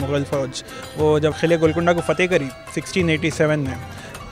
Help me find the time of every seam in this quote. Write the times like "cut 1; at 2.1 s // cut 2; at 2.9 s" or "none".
cut 1; at 1.4 s